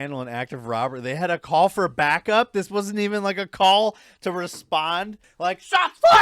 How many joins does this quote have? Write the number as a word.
one